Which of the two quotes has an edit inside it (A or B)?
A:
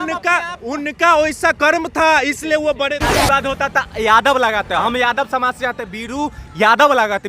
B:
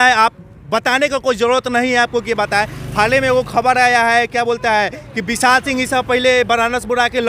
A